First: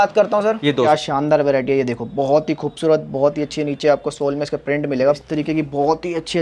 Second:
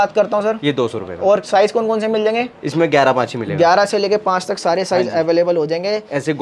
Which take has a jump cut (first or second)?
first